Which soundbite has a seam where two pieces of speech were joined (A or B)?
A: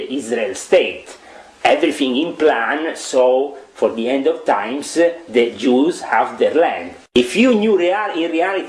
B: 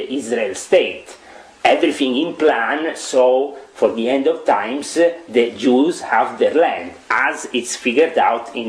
A